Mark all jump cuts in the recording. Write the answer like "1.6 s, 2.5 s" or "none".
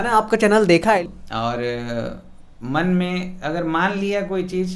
1.0 s